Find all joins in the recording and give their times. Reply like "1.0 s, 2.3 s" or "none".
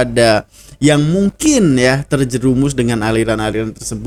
none